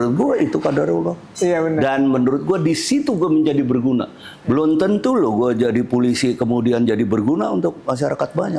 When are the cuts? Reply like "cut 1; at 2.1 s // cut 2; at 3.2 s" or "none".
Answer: none

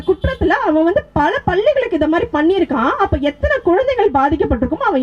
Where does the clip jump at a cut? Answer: none

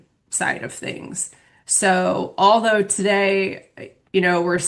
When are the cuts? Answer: none

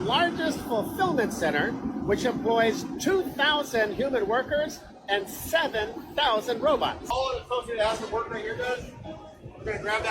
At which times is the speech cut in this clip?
cut 1; at 7.1 s

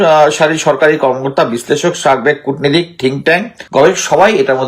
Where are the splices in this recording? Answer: cut 1; at 3.6 s

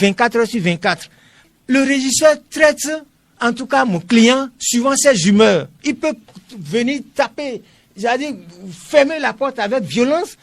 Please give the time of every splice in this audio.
cut 1; at 1.4 s

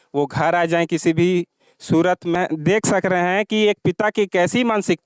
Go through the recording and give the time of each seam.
cut 1; at 2.3 s

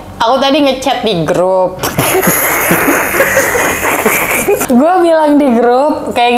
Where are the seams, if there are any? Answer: cut 1; at 4.6 s

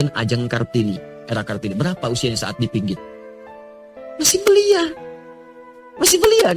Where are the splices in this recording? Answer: none

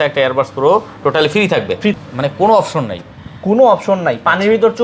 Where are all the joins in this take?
cut 1; at 1.9 s

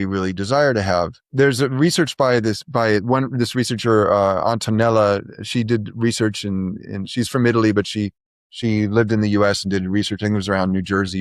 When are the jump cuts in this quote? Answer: cut 1; at 1.2 s

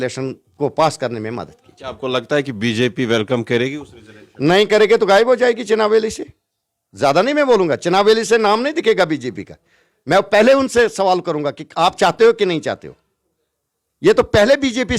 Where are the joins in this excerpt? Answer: none

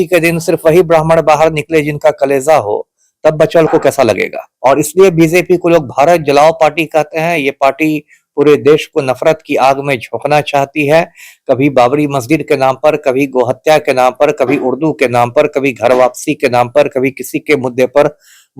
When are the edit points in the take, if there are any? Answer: cut 1; at 4.4 s

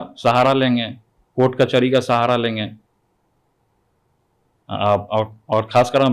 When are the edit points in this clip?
none

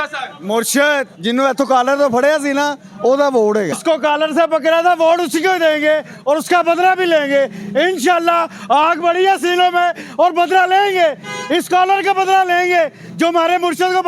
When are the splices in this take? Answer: cut 1; at 3.8 s

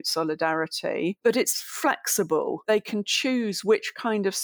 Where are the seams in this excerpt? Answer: cut 1; at 1.2 s // cut 2; at 2.6 s

